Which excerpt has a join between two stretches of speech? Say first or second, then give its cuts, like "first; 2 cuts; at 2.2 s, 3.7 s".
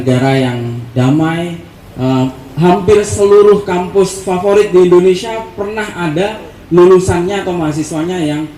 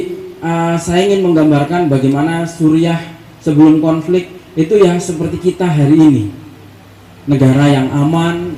first; 1 cut; at 1.7 s